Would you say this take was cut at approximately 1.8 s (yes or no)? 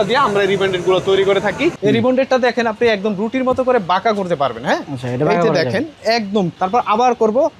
yes